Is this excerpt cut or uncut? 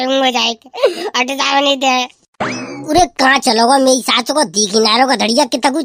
cut